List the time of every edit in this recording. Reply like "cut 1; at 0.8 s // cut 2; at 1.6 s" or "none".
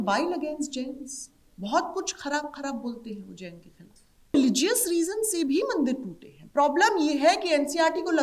cut 1; at 4.3 s